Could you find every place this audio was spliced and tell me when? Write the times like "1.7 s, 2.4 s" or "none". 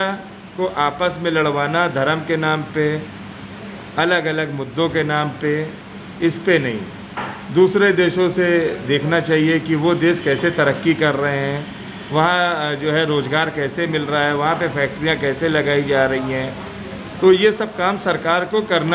none

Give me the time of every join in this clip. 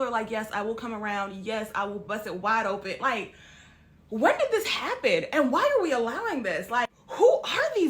1.7 s

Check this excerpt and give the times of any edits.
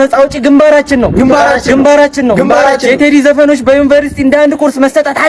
none

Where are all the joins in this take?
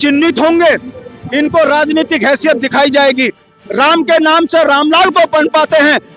3.5 s

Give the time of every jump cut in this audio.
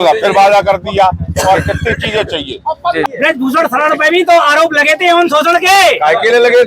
3.0 s

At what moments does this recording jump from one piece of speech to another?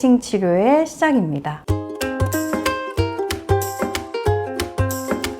1.5 s

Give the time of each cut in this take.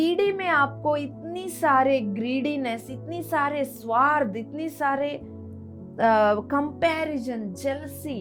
none

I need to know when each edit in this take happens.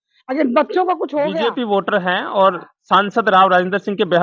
1.3 s

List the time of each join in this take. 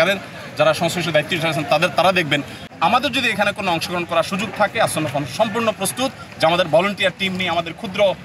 2.6 s

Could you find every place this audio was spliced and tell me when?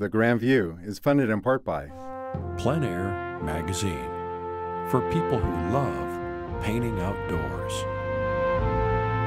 1.9 s

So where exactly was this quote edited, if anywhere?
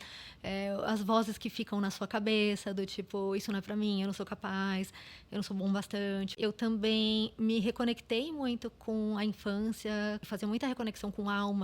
6.3 s, 10.3 s

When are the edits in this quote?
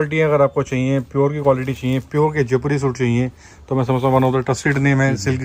none

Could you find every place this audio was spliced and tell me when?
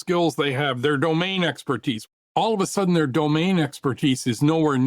2.0 s

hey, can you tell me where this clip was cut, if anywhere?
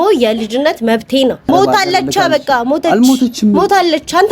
1.4 s

